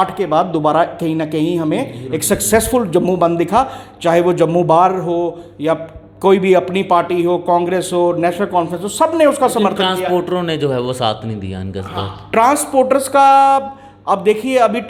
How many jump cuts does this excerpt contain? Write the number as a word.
zero